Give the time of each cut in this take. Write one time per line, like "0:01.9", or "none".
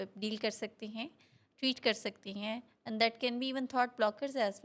none